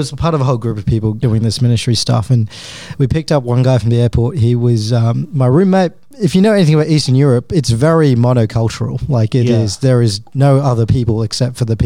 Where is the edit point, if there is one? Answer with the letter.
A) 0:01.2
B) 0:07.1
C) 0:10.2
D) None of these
A